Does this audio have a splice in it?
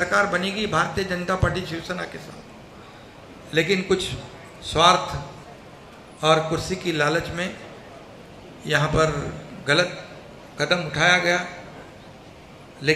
no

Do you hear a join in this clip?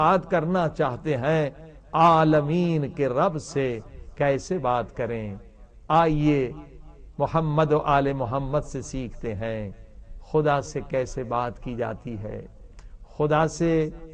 yes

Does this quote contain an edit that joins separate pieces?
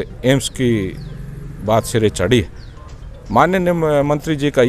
no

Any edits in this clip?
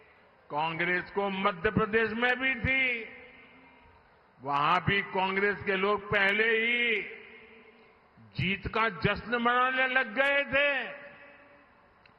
no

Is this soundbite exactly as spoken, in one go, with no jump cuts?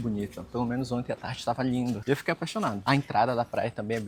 yes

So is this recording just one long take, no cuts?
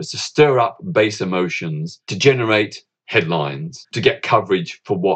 no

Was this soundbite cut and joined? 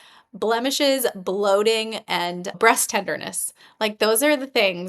yes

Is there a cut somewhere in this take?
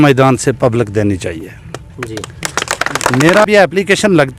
yes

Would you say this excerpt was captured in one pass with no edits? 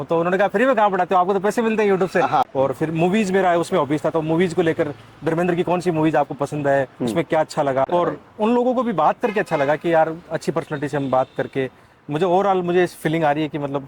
no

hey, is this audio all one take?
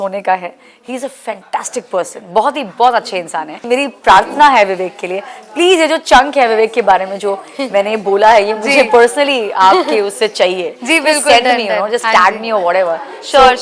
no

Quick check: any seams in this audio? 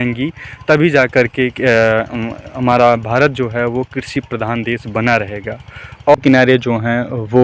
yes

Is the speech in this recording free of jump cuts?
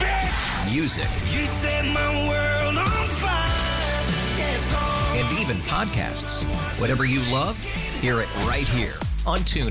yes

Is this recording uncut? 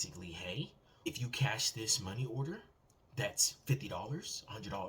no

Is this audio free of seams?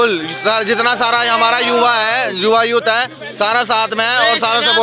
yes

